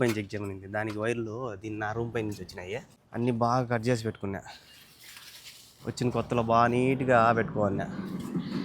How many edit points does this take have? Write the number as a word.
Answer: one